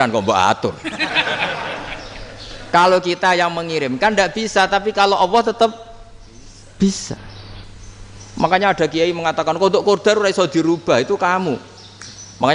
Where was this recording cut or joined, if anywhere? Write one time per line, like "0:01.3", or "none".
none